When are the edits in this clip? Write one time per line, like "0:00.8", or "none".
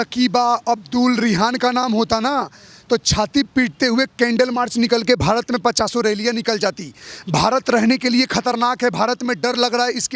none

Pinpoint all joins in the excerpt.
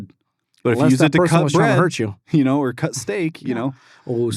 none

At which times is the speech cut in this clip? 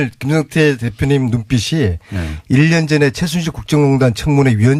none

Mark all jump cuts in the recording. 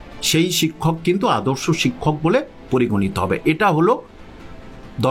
none

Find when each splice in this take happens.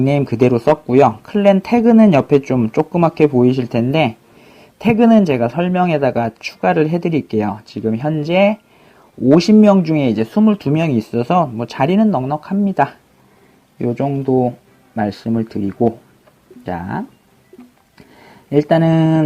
0:12.4

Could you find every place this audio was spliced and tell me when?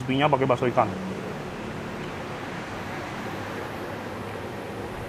none

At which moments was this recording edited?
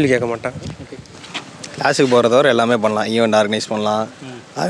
0:01.1

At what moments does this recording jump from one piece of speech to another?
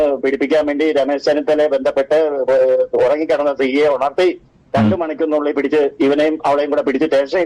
none

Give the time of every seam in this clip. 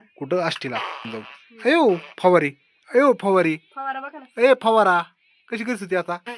0:01.0

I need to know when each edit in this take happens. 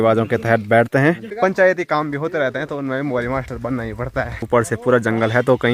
0:01.3
0:04.4

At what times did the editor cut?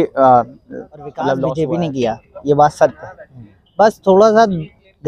0:01.5

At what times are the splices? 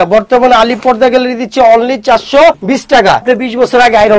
0:03.2

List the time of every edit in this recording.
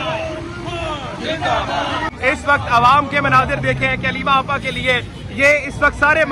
0:02.1

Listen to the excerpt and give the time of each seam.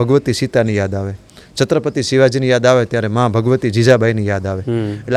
none

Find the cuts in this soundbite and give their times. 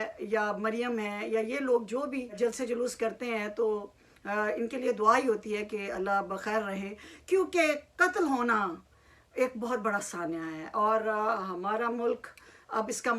none

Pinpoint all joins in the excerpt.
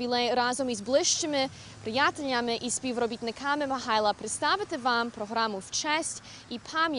0:02.3

